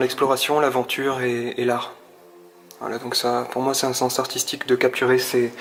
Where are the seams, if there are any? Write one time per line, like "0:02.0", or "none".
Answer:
none